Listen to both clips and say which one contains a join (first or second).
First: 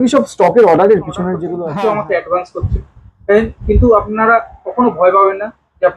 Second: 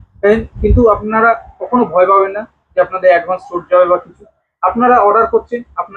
first